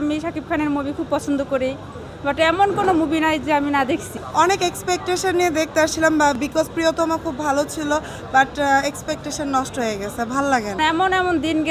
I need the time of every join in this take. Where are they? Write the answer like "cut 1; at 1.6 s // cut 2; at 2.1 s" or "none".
cut 1; at 4.2 s // cut 2; at 10.8 s